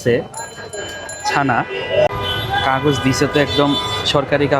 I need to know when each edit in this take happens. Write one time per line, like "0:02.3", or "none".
0:02.1